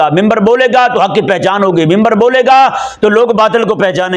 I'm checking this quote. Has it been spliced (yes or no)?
no